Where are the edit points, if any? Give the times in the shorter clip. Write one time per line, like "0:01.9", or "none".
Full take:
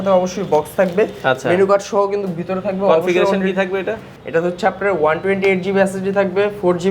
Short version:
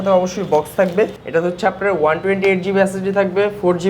0:01.2